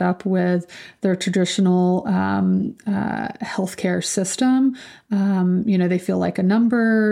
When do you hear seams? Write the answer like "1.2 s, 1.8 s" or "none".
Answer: none

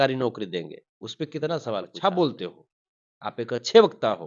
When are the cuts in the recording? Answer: 1.9 s

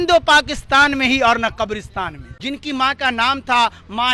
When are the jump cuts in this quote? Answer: 2.3 s

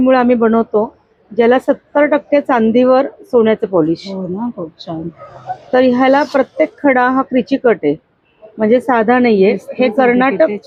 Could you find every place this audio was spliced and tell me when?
none

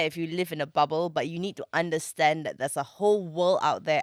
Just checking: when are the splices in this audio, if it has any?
none

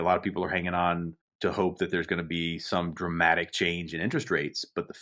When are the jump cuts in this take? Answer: 1.2 s

